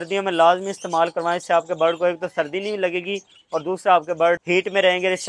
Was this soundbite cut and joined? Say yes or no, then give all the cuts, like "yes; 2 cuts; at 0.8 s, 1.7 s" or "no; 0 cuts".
yes; 1 cut; at 4.4 s